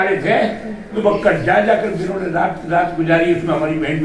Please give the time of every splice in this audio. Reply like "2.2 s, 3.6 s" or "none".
1.0 s